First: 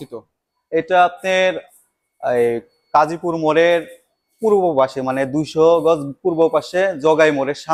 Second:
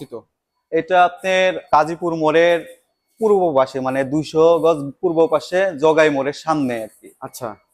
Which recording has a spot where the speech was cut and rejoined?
second; 1 cut; at 1.6 s

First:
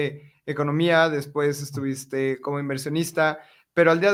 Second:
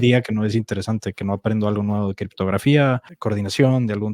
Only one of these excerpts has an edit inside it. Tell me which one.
second; 1 cut; at 3.1 s

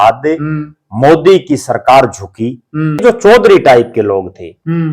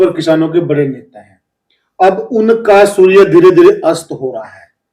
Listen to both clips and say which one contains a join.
first; 1 cut; at 3.0 s

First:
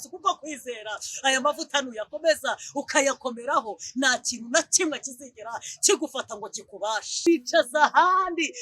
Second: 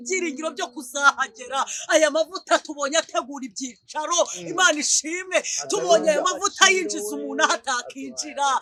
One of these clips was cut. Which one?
first; 1 cut; at 7.3 s

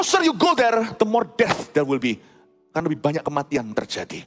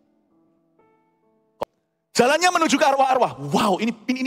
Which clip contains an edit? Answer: second; 1 cut; at 1.5 s

